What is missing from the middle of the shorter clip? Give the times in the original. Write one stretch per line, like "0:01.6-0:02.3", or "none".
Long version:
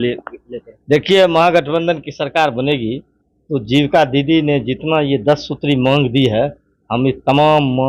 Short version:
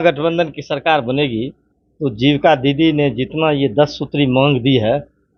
none